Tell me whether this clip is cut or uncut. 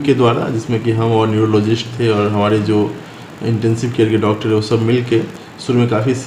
uncut